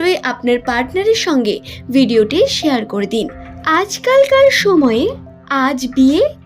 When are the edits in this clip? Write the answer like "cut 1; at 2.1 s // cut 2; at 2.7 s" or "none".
cut 1; at 3.6 s